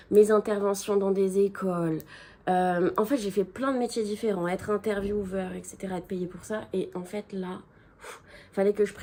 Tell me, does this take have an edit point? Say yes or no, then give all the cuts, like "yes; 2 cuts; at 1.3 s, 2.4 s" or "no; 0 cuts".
no; 0 cuts